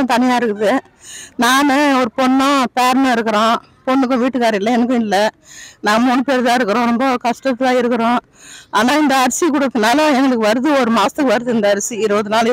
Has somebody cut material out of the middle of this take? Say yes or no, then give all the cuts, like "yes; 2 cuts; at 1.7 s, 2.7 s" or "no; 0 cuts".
no; 0 cuts